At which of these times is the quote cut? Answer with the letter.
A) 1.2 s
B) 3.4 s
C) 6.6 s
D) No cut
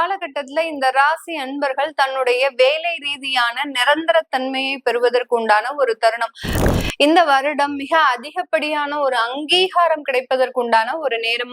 C